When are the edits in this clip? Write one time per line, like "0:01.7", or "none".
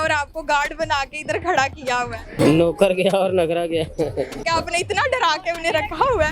0:02.4
0:04.4